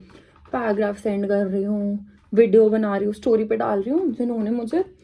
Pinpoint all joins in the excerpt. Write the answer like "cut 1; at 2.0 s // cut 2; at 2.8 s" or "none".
none